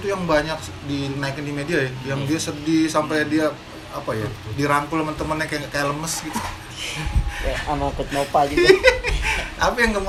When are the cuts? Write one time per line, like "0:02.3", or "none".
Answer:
none